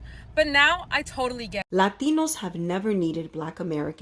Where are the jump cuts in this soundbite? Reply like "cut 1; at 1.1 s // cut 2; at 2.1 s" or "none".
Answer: cut 1; at 1.6 s